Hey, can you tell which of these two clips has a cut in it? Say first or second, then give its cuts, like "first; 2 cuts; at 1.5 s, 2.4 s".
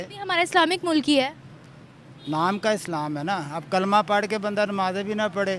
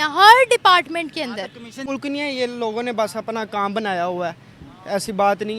second; 1 cut; at 1.9 s